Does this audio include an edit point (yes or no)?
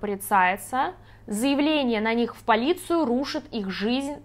yes